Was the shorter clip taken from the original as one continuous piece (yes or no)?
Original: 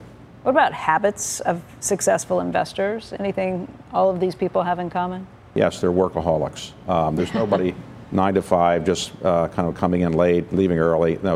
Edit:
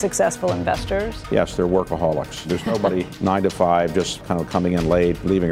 no